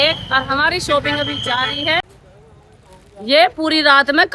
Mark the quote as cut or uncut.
cut